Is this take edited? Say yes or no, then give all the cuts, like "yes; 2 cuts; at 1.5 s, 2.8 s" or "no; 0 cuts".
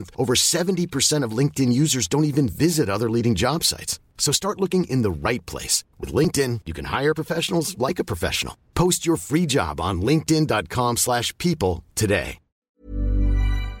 yes; 1 cut; at 12.8 s